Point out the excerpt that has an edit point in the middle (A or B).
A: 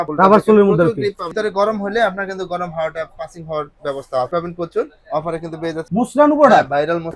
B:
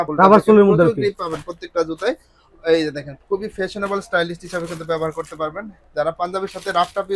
A